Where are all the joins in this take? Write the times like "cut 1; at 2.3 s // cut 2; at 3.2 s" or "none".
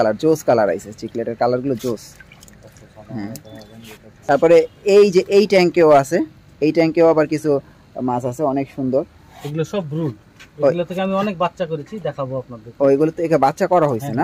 none